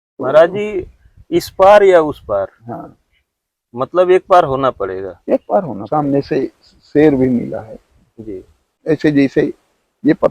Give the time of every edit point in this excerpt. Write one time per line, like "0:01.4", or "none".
0:05.8
0:08.7